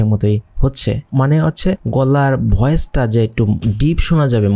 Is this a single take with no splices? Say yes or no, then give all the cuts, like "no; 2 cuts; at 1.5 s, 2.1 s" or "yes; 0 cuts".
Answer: yes; 0 cuts